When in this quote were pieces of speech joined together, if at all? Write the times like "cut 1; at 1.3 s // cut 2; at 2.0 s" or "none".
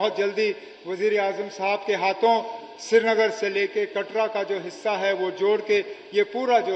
none